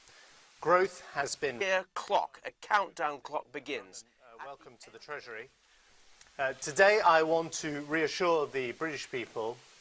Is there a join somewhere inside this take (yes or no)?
no